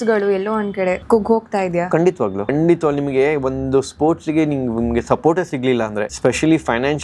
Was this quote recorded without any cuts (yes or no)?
no